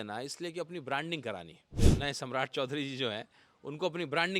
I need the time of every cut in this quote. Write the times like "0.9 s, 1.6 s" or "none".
1.6 s